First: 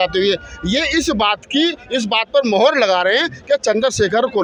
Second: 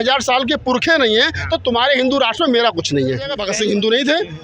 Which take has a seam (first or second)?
second